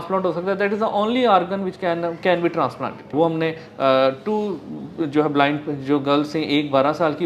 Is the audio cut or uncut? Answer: cut